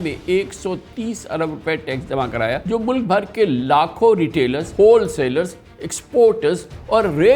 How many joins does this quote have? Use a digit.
2